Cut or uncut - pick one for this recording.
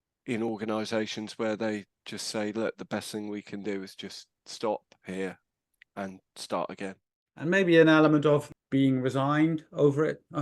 cut